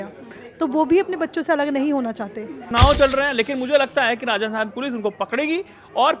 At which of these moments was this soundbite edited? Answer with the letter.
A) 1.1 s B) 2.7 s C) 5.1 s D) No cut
B